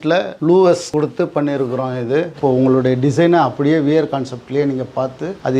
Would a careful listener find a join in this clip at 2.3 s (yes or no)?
yes